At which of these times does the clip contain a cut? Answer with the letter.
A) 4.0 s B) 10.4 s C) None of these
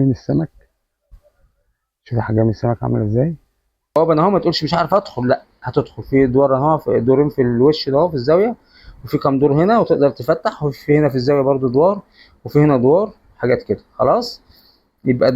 A